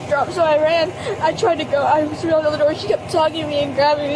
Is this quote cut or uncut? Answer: uncut